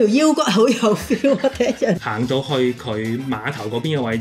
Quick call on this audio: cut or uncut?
cut